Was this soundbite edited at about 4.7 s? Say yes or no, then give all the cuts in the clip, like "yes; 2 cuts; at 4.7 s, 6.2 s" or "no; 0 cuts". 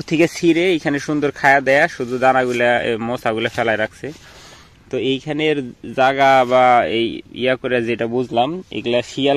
no; 0 cuts